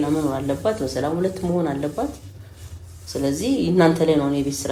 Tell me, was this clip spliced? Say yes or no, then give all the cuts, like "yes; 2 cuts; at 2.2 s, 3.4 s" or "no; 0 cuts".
no; 0 cuts